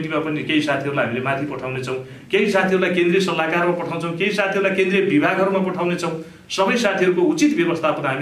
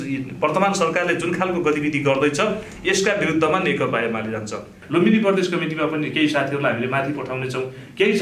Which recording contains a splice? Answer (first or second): second